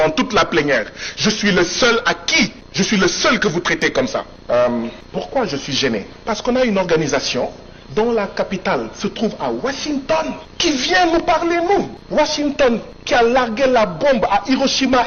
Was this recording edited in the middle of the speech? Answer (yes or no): yes